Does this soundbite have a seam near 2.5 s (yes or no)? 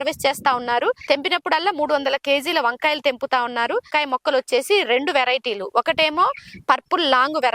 no